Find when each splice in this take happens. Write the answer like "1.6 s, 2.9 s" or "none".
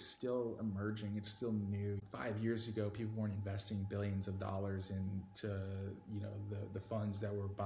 2.0 s